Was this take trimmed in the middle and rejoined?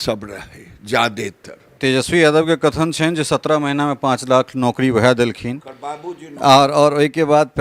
yes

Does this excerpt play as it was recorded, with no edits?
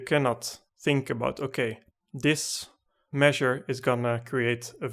yes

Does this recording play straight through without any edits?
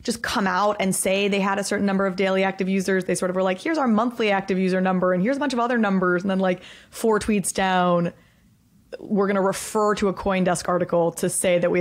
yes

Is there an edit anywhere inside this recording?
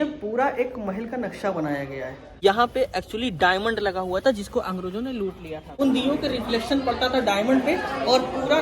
yes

